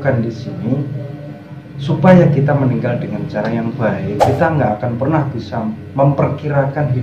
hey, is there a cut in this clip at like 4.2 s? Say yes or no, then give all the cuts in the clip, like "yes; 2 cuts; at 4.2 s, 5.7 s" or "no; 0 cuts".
yes; 1 cut; at 4.2 s